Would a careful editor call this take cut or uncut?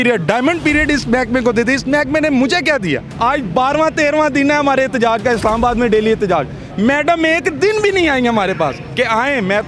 cut